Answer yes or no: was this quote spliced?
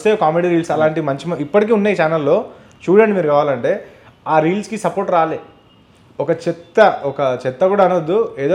no